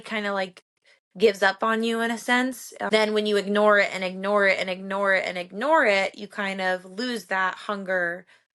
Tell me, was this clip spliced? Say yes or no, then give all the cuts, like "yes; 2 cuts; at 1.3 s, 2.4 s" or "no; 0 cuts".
yes; 1 cut; at 2.7 s